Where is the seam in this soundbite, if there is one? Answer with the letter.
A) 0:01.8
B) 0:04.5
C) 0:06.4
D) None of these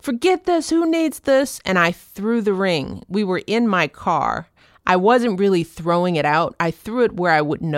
D